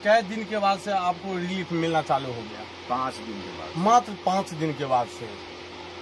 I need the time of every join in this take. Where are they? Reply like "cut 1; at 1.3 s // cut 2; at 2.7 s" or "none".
none